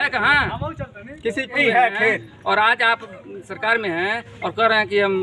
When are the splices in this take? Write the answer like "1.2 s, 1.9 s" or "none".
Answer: 1.6 s